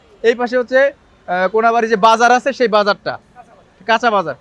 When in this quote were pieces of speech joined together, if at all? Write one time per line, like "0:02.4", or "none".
none